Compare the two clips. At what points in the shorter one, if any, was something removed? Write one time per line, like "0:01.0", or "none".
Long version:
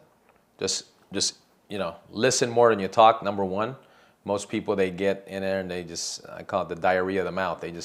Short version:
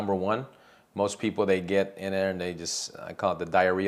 none